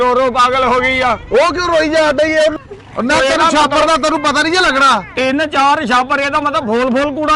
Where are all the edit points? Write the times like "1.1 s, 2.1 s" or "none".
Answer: 2.6 s